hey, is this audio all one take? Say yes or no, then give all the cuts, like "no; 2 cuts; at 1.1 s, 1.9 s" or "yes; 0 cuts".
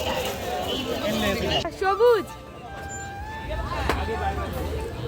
no; 1 cut; at 1.6 s